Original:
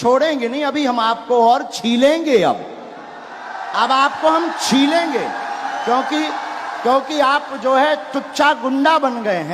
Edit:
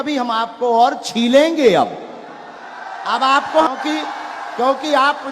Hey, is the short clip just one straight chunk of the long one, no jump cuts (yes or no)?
no